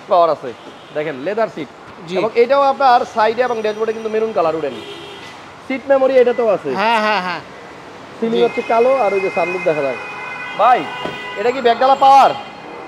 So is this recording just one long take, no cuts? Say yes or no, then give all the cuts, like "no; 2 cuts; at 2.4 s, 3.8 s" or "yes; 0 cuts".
yes; 0 cuts